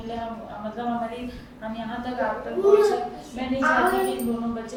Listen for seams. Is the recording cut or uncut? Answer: uncut